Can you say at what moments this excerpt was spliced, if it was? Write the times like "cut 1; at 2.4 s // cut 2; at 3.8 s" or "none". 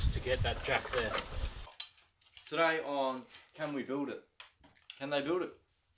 cut 1; at 1.8 s